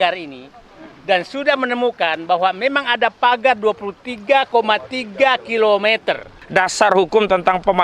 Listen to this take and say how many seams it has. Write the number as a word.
one